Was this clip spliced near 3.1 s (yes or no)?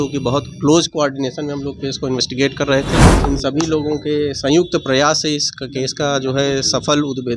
yes